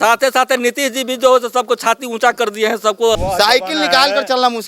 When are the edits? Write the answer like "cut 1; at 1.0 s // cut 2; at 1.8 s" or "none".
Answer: cut 1; at 3.2 s